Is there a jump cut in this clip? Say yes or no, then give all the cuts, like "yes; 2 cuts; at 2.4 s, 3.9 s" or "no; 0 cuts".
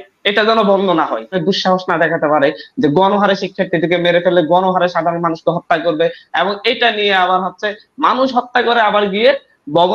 yes; 1 cut; at 1.4 s